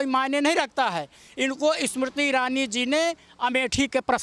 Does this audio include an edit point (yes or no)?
no